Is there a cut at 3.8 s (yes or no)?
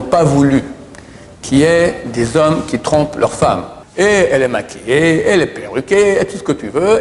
yes